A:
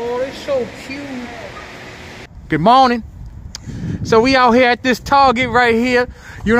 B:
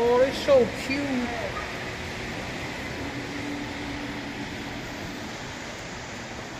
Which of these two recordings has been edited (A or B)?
A